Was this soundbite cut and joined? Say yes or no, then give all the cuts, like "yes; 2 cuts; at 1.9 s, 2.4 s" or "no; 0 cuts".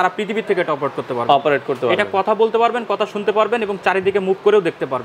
no; 0 cuts